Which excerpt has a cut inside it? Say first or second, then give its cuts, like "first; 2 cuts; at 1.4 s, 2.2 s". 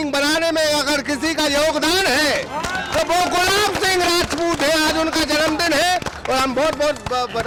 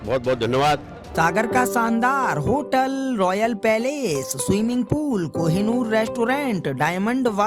second; 1 cut; at 1.2 s